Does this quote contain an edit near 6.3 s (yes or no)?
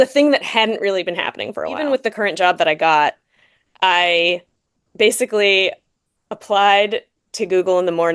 no